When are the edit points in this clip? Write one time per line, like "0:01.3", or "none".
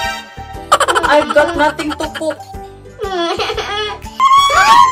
0:04.0